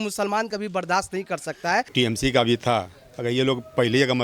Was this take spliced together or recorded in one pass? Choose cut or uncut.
cut